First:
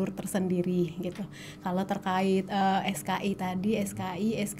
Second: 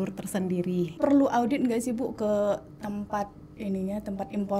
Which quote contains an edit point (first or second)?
second